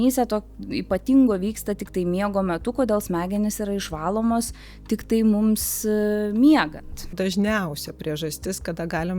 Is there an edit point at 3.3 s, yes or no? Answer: no